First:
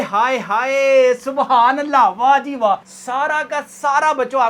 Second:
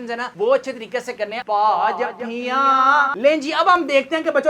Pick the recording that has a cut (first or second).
second